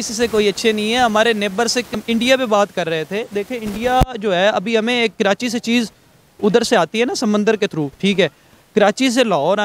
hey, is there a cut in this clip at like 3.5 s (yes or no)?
no